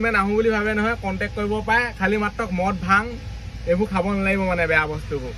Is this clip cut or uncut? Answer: uncut